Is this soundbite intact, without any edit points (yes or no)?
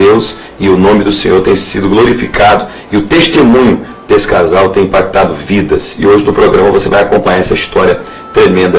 yes